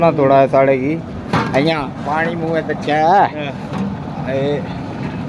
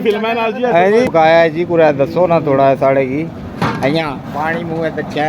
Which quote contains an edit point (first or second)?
second